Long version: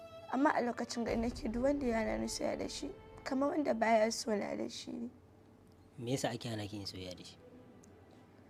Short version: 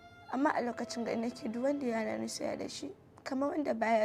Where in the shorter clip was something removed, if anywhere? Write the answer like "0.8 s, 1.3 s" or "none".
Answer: none